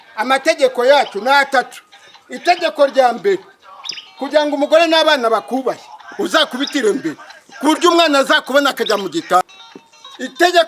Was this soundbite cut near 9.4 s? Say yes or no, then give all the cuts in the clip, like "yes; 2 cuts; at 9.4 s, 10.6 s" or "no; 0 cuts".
yes; 1 cut; at 9.4 s